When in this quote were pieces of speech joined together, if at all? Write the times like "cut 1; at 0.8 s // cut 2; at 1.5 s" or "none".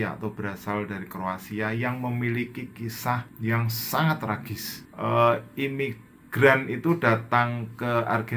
cut 1; at 3.3 s // cut 2; at 4.9 s